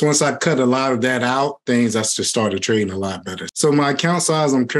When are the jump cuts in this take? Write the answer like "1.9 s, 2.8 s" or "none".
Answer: 1.6 s, 3.5 s

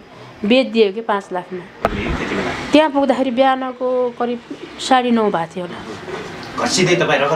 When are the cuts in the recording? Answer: 1.8 s

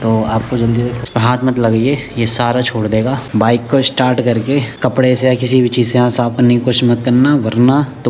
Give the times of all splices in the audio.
1.0 s

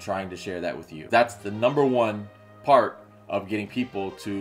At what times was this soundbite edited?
1.1 s

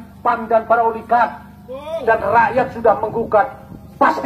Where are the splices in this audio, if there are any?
1.9 s

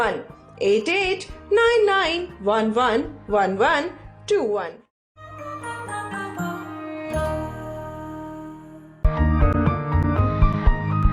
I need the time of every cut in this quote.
5.2 s, 8.9 s

